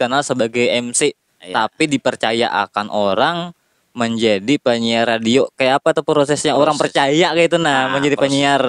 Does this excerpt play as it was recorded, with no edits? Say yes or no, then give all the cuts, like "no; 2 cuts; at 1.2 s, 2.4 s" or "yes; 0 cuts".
yes; 0 cuts